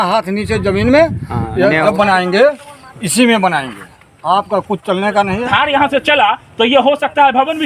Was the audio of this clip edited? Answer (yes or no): yes